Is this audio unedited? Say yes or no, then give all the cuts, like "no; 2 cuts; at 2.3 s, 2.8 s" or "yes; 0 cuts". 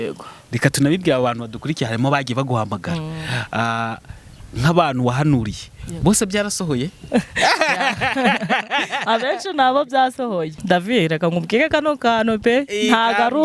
no; 1 cut; at 10.6 s